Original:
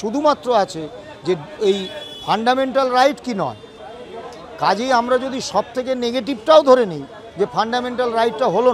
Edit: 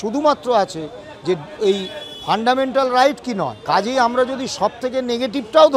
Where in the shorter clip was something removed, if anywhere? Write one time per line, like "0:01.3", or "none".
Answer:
0:03.6